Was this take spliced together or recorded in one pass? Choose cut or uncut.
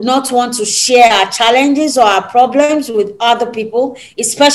uncut